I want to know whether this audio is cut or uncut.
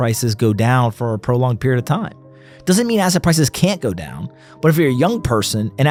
uncut